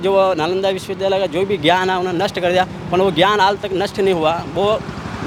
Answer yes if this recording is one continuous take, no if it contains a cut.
yes